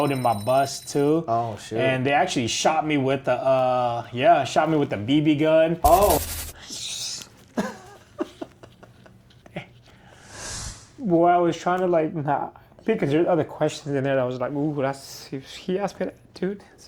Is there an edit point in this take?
yes; 1 cut; at 6.2 s

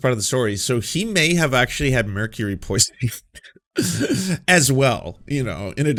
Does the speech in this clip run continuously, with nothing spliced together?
yes; 0 cuts

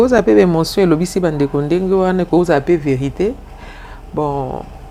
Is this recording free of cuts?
yes; 0 cuts

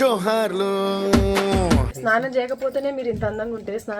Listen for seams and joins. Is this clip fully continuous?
no; 1 cut; at 1.9 s

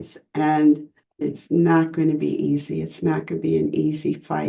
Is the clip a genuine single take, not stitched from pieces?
no; 1 cut; at 1.2 s

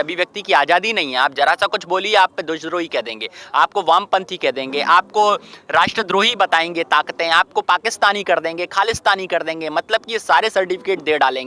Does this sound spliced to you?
no; 0 cuts

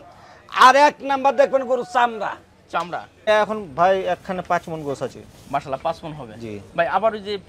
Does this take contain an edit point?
yes; 1 cut; at 3.1 s

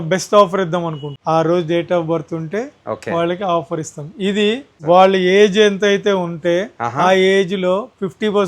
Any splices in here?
yes; 2 cuts; at 1.1 s, 4.7 s

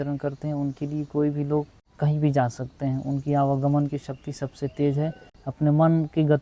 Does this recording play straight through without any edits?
yes; 0 cuts

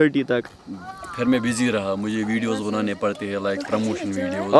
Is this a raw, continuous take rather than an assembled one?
yes; 0 cuts

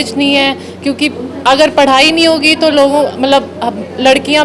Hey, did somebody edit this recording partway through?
no; 0 cuts

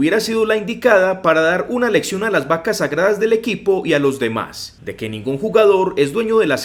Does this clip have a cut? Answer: no; 0 cuts

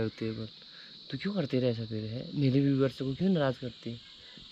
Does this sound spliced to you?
no; 0 cuts

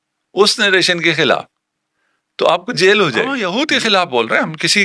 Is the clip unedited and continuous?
no; 1 cut; at 3.4 s

